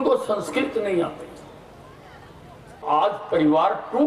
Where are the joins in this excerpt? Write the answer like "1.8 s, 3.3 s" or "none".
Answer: 2.8 s